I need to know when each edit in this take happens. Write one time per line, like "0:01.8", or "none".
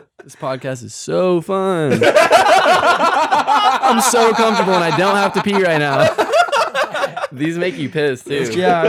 none